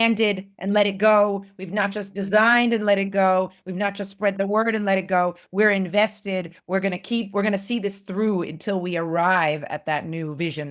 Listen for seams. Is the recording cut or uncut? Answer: uncut